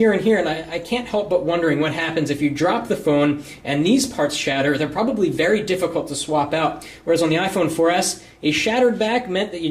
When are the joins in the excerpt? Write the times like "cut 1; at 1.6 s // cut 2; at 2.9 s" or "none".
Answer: cut 1; at 1.8 s